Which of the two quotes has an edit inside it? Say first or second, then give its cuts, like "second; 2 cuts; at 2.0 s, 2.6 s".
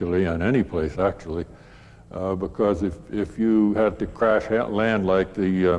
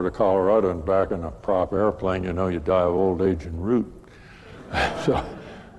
first; 1 cut; at 2.5 s